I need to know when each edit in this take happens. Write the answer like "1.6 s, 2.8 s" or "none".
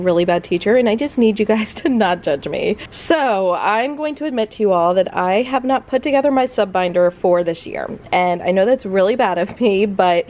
none